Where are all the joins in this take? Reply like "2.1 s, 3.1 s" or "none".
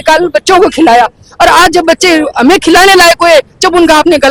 none